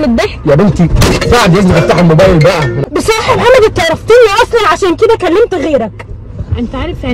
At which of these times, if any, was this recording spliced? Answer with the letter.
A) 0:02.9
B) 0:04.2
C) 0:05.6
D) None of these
A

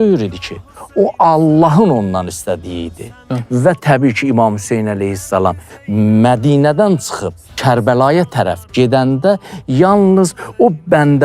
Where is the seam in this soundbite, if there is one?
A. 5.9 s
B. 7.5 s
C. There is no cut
B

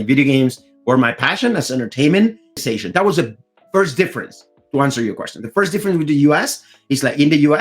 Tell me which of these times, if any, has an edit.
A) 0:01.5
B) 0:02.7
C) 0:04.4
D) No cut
B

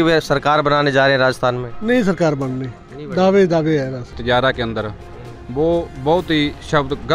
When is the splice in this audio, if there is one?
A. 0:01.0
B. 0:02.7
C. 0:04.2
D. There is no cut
C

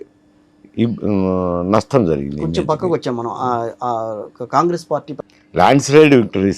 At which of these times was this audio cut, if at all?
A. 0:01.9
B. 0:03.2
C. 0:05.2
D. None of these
C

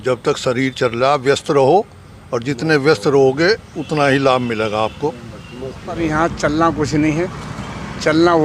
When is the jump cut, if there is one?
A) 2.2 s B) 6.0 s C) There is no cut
B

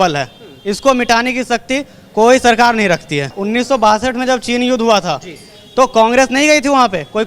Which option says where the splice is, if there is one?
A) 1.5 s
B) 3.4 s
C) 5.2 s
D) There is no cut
B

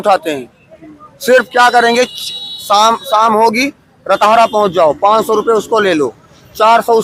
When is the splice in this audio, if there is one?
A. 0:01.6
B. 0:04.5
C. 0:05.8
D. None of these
D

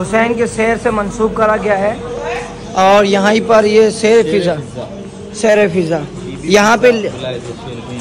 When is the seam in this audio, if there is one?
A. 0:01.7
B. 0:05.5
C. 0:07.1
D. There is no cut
D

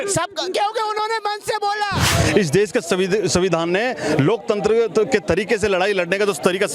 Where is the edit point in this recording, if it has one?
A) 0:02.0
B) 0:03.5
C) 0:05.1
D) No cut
A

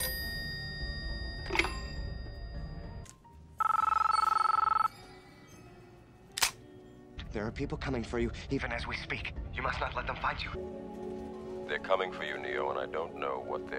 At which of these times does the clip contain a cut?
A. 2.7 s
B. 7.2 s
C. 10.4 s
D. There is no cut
B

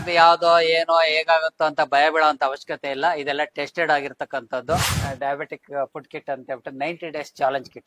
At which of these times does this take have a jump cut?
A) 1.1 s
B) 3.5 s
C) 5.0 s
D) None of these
C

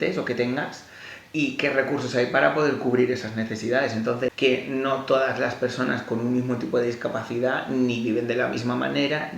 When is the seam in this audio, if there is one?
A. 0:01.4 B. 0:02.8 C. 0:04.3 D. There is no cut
C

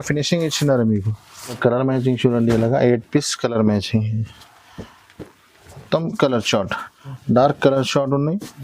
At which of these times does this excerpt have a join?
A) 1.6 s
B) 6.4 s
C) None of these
A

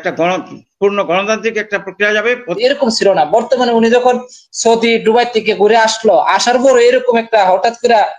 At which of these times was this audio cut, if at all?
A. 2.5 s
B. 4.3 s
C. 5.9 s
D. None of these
A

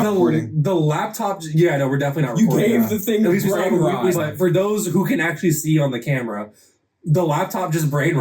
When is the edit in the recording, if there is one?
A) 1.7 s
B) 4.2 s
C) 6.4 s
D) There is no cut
B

